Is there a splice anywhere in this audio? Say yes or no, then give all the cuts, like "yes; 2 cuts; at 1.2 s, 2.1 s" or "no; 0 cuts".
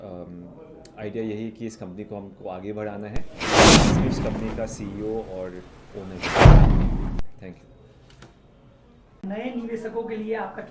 yes; 5 cuts; at 3.3 s, 4.3 s, 6.2 s, 7.2 s, 9.2 s